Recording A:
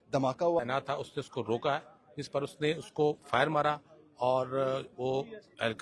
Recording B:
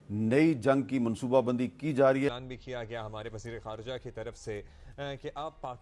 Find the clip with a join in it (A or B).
B